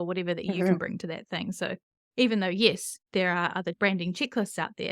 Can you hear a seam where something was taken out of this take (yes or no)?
yes